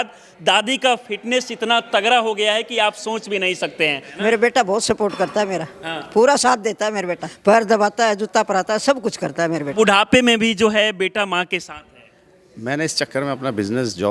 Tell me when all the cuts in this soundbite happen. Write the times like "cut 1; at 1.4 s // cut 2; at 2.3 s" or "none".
cut 1; at 4.1 s // cut 2; at 7.2 s // cut 3; at 9.7 s